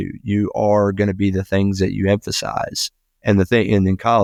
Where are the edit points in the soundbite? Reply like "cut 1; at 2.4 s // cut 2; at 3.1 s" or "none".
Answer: none